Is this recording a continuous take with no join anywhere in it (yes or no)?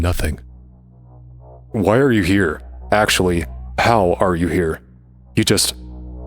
no